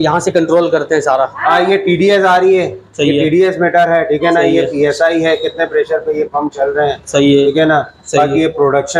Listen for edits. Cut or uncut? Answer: uncut